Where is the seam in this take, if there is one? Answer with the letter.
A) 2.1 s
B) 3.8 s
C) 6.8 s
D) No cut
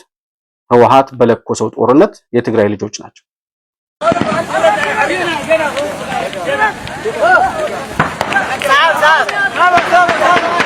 D